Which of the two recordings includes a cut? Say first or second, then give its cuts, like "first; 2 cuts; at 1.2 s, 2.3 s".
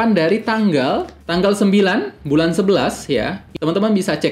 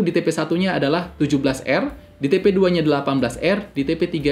first; 2 cuts; at 1.2 s, 3.4 s